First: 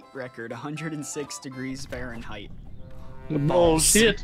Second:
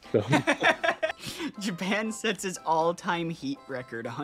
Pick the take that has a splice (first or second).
second